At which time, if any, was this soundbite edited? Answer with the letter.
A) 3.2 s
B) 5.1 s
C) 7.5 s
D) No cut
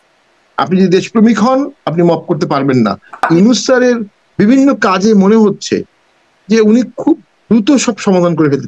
A